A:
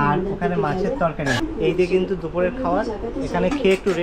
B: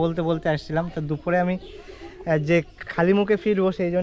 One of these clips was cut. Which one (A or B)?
A